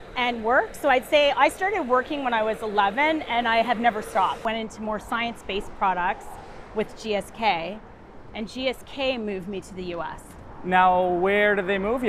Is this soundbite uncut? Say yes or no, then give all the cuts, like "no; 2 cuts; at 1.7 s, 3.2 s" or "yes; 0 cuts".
no; 1 cut; at 4.4 s